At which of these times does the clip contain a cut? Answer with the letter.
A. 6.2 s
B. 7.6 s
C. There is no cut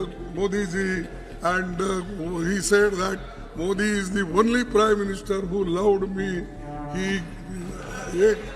C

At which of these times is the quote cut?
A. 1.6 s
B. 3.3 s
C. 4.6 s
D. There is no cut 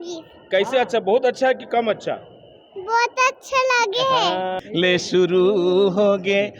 C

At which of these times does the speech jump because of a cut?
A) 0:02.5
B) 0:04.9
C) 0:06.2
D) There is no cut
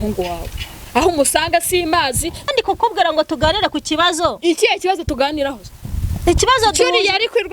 A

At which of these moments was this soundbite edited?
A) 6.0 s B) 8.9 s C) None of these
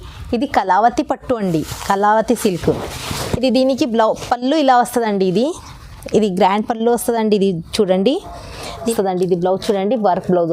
B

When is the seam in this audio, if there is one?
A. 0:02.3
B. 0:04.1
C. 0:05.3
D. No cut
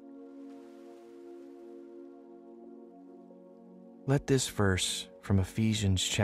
B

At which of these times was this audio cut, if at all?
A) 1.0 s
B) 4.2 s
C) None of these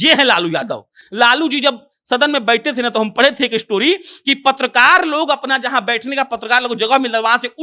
A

